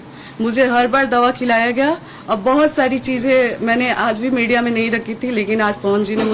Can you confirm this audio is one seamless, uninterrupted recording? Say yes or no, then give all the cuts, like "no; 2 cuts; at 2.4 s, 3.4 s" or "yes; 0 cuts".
yes; 0 cuts